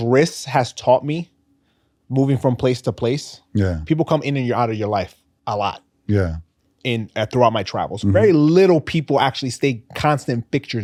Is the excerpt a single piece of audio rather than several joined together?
yes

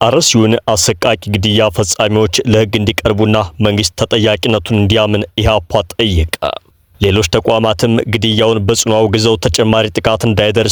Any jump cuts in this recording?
no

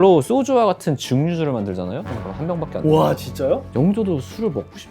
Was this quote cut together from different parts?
yes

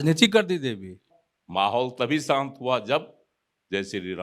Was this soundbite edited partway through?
yes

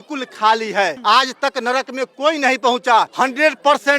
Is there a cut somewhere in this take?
yes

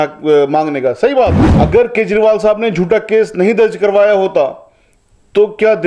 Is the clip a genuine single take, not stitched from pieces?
no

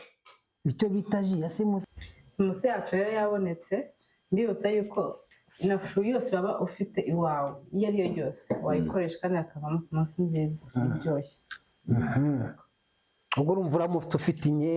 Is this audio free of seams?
no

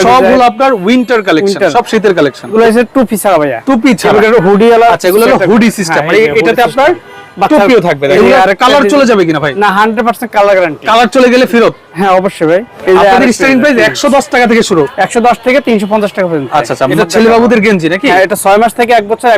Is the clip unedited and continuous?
no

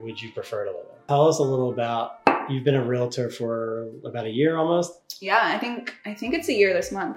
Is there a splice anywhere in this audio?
yes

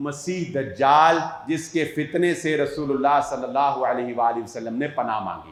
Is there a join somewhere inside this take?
no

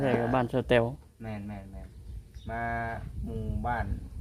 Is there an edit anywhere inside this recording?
no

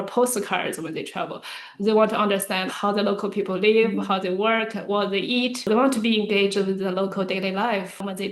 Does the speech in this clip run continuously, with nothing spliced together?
no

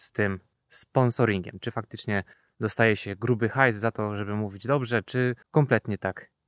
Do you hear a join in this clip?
yes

